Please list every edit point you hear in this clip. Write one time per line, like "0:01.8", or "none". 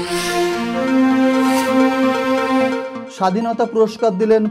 0:02.9